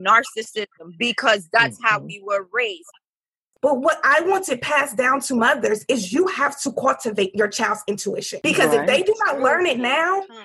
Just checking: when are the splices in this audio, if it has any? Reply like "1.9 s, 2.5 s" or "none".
3.4 s, 8.3 s